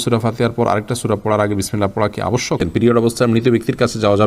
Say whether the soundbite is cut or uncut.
cut